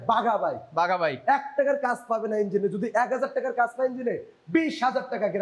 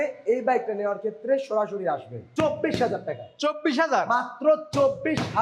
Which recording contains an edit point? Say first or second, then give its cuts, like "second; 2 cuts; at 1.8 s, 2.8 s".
second; 1 cut; at 2.2 s